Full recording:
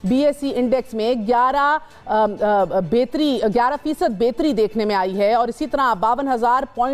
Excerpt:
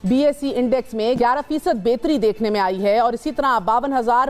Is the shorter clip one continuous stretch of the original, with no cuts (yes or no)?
no